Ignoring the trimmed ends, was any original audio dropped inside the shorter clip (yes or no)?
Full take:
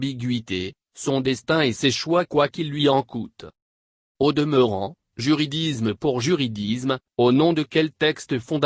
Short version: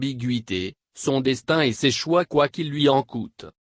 no